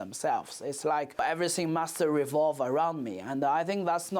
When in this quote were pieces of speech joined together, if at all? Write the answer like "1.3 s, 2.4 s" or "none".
1.2 s